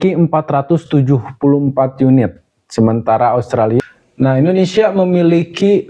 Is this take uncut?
no; 1 cut; at 3.8 s

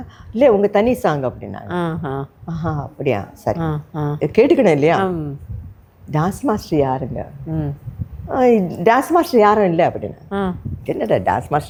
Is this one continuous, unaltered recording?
yes; 0 cuts

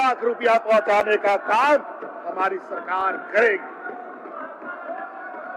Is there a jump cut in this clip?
no; 0 cuts

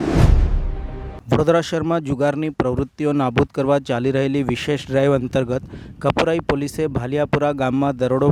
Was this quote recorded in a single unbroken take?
yes; 0 cuts

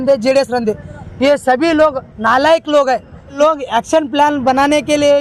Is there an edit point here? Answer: yes; 1 cut; at 3.3 s

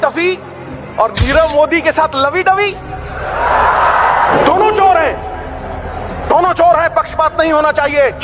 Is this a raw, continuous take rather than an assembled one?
yes; 0 cuts

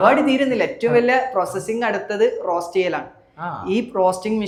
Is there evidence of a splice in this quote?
no; 0 cuts

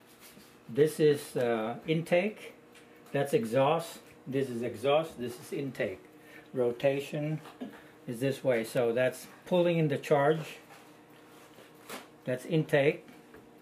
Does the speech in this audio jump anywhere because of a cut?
yes; 1 cut; at 3.5 s

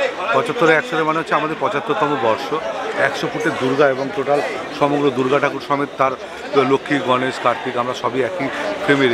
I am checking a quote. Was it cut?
no; 0 cuts

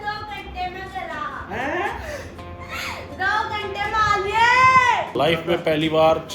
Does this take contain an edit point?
yes; 1 cut; at 5.1 s

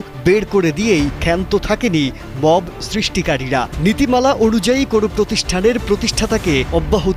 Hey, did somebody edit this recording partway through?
no; 0 cuts

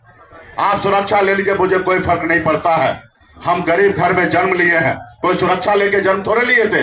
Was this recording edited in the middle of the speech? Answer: no; 0 cuts

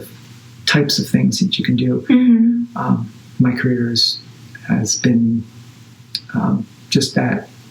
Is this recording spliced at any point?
no; 0 cuts

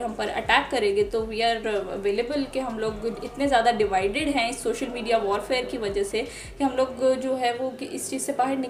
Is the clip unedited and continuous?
yes; 0 cuts

